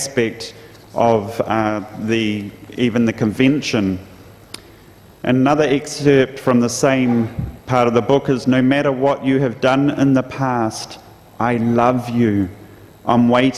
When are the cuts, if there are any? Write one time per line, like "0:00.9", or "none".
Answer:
0:10.7